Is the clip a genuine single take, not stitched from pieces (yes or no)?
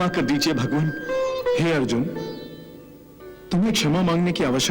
no